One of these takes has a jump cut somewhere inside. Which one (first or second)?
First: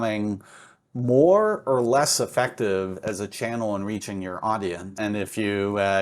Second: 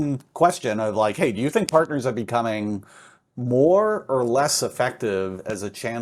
first